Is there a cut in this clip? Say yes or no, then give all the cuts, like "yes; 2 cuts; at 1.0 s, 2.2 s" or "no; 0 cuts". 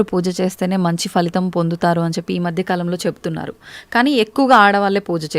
no; 0 cuts